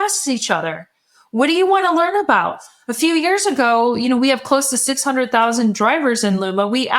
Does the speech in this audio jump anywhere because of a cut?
no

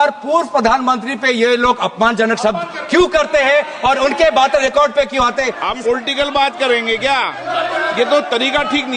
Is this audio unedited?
no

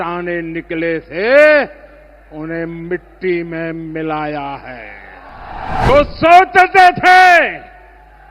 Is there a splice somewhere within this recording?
yes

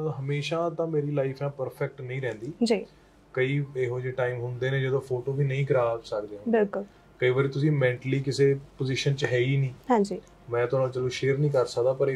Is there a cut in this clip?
no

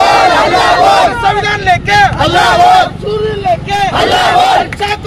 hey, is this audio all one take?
yes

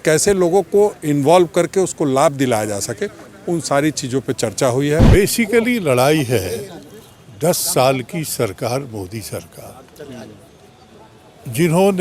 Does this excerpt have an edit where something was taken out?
yes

